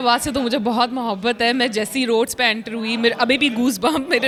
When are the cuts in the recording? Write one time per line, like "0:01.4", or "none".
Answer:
none

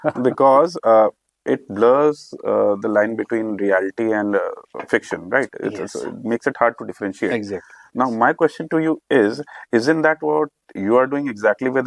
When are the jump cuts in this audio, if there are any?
none

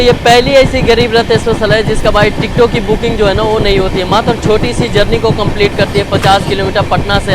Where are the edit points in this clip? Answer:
none

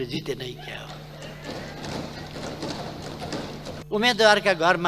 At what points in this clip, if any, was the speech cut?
0:03.8

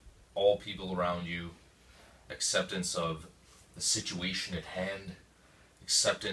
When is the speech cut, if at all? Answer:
none

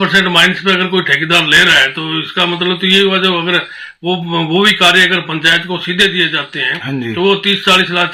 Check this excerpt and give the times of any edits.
none

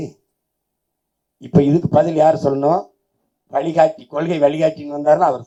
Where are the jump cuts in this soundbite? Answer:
none

